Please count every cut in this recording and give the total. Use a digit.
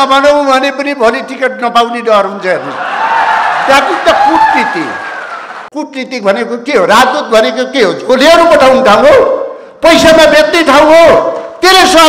1